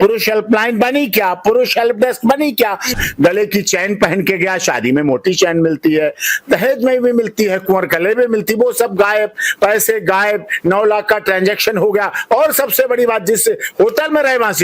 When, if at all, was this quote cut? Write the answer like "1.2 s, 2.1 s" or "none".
2.9 s